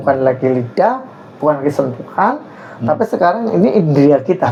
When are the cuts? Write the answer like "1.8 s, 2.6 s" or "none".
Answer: none